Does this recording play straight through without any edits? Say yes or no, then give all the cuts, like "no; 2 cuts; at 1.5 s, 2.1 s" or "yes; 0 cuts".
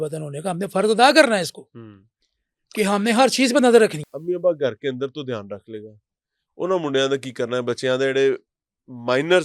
no; 1 cut; at 4.0 s